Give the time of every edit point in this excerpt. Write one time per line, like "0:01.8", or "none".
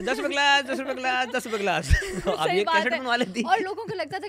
none